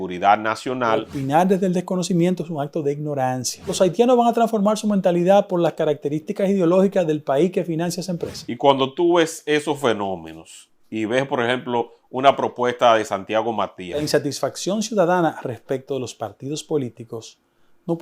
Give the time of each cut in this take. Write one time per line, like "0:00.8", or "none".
0:01.1
0:03.7
0:08.4
0:14.0